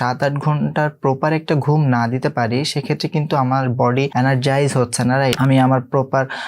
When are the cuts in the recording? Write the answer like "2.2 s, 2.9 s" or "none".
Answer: 4.1 s, 5.4 s